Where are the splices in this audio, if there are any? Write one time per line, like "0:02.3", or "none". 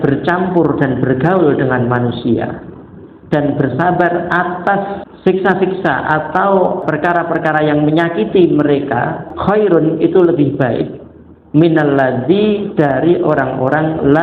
0:05.0
0:06.8
0:09.2